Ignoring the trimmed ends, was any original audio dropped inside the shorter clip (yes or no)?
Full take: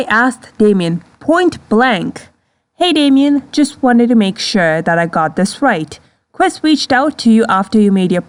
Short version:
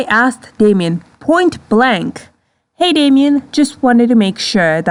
no